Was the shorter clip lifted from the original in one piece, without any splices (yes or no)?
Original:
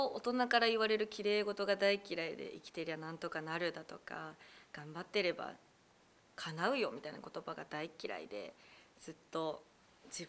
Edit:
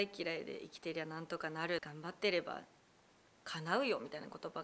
no